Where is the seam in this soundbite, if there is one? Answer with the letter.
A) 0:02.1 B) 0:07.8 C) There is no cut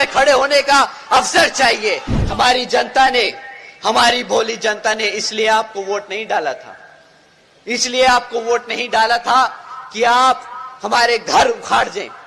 A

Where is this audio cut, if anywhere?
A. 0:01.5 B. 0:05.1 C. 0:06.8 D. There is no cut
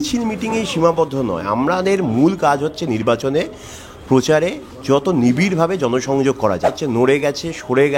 C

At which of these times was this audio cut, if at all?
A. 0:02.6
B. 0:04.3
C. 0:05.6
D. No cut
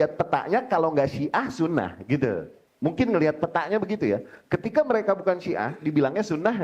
A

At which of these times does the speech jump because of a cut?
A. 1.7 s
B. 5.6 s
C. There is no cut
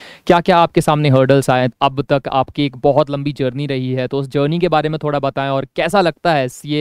A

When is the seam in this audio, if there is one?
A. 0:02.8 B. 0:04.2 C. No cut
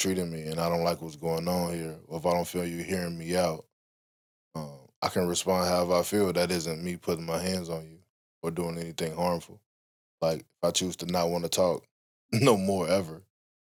C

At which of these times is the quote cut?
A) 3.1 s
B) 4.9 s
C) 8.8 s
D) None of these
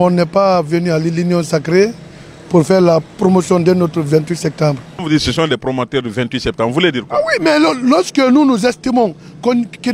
B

